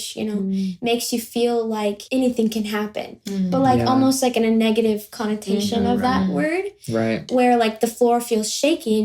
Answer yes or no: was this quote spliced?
yes